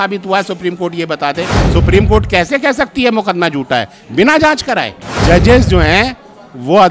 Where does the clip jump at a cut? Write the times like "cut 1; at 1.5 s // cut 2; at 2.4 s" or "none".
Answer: cut 1; at 1.5 s // cut 2; at 5.1 s

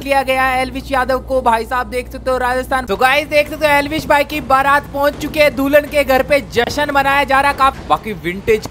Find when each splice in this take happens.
cut 1; at 2.8 s // cut 2; at 7.8 s

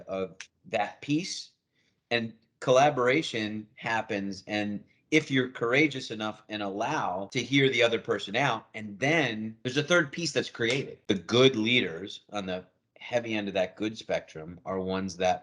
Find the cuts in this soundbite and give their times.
cut 1; at 10.9 s

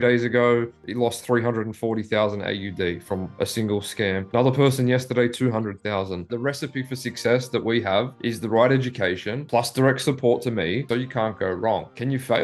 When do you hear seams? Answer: cut 1; at 6.3 s // cut 2; at 10.8 s

